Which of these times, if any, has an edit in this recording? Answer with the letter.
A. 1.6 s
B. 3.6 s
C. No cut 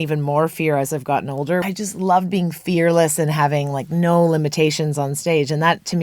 A